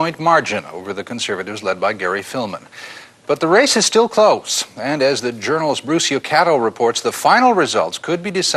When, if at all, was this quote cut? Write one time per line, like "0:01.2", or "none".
none